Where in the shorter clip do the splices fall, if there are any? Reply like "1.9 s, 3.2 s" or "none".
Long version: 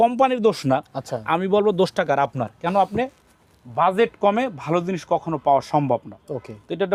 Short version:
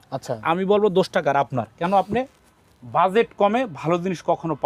none